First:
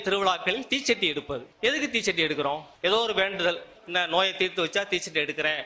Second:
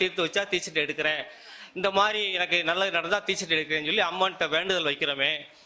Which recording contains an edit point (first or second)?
first